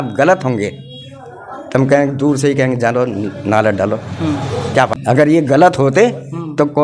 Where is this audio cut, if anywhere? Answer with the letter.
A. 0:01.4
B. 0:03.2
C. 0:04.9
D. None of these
C